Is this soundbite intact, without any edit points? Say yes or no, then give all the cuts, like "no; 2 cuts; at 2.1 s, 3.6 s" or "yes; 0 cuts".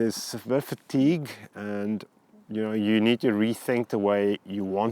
yes; 0 cuts